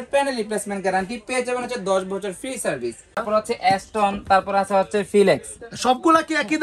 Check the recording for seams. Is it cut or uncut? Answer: cut